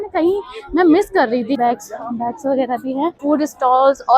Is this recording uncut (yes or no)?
no